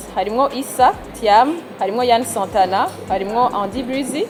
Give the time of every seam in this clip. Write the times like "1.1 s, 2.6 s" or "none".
none